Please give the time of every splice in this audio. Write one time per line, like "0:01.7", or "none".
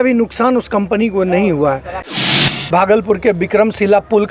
0:02.1